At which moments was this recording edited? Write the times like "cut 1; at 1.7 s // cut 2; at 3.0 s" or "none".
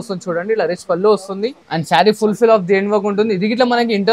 cut 1; at 1.6 s